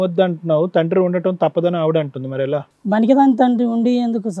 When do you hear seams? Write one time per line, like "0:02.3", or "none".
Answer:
none